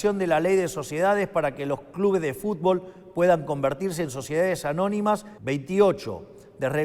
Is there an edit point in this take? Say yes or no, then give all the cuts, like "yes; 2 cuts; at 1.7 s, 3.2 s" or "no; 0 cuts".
yes; 1 cut; at 5.3 s